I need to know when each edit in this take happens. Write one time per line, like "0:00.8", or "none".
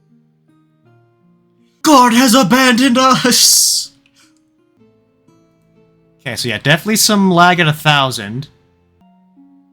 0:01.8
0:04.8
0:09.0